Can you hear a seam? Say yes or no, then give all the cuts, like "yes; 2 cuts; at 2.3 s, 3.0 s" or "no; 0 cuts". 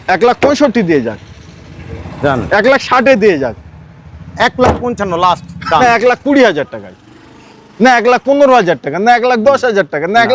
yes; 1 cut; at 5.8 s